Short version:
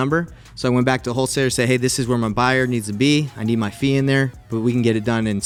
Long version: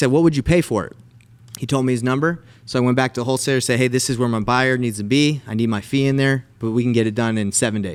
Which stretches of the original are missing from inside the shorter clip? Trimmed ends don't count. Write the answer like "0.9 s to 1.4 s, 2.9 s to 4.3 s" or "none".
none